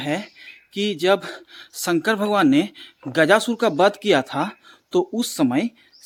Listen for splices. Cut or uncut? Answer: uncut